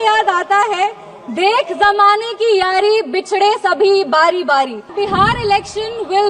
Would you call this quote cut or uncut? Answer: cut